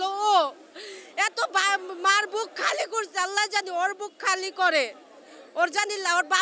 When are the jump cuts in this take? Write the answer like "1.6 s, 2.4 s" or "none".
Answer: none